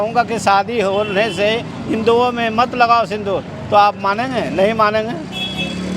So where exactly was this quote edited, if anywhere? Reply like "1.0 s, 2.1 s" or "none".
none